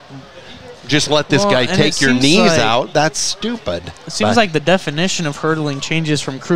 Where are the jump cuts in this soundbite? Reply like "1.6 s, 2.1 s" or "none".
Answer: 4.0 s